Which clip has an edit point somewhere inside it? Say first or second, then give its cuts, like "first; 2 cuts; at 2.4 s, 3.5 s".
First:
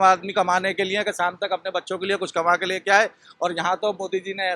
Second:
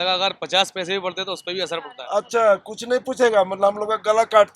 second; 1 cut; at 2.0 s